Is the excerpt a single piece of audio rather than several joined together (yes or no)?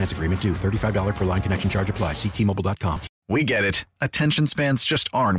no